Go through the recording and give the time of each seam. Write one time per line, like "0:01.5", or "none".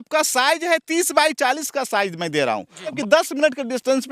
0:03.0